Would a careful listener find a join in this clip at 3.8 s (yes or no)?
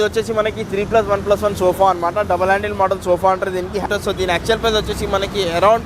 yes